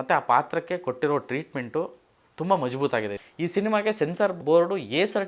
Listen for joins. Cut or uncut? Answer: cut